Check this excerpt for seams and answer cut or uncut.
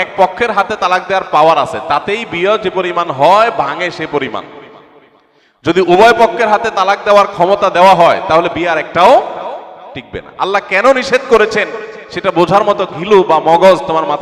uncut